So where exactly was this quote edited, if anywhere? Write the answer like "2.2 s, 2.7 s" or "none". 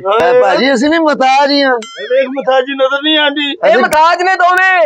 none